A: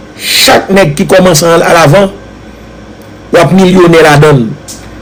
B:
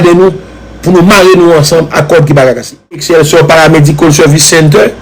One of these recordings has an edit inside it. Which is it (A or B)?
B